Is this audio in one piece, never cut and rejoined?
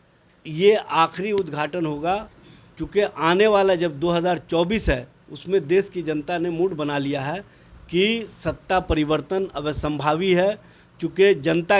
yes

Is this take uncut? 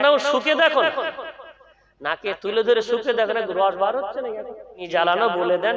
no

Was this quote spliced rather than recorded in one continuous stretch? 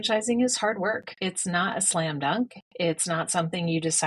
yes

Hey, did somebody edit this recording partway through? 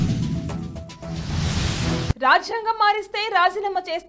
no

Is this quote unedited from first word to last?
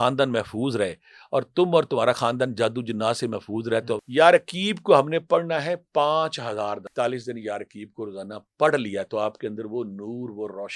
no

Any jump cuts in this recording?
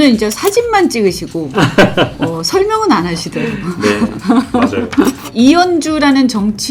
yes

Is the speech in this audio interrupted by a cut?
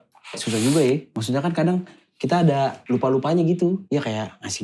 yes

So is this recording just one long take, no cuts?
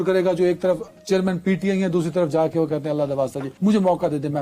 yes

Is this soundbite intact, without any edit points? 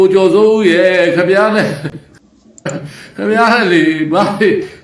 no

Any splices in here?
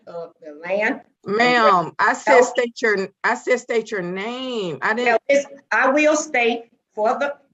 yes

